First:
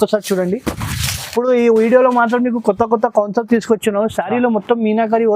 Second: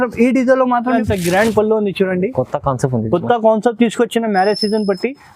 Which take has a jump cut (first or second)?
second